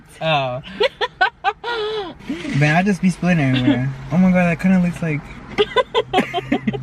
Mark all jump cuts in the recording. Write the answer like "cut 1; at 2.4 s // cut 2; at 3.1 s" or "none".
cut 1; at 2.2 s